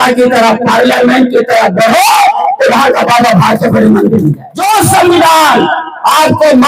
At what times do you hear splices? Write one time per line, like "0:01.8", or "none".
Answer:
0:04.5